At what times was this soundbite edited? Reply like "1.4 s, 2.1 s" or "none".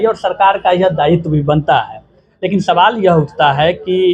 none